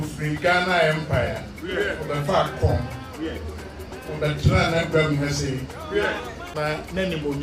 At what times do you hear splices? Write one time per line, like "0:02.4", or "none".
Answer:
0:06.4